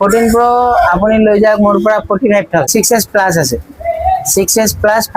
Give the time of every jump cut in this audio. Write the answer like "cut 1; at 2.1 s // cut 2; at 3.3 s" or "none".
cut 1; at 2.7 s